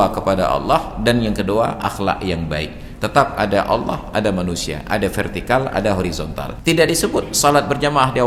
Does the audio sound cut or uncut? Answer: cut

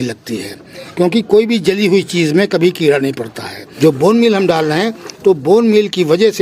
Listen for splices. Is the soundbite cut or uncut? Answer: cut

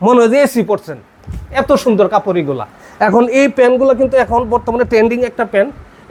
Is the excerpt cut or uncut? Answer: uncut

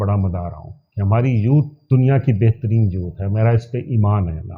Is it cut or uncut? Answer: uncut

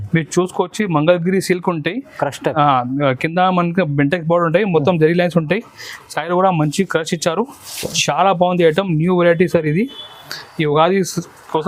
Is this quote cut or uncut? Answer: uncut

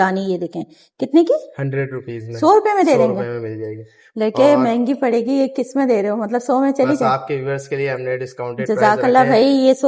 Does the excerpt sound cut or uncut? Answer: uncut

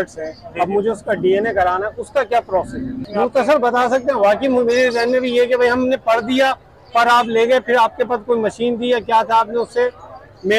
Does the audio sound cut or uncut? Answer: cut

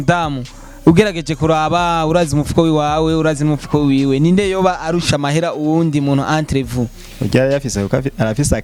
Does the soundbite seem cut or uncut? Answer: uncut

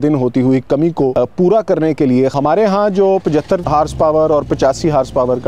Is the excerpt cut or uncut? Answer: cut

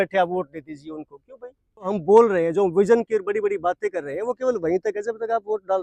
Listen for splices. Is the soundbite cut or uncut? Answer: cut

